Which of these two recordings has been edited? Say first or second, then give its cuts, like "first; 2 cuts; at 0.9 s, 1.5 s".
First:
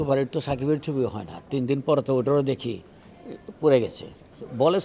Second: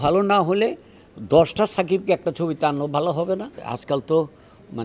second; 1 cut; at 3.7 s